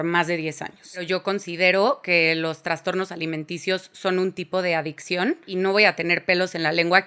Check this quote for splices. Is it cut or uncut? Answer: cut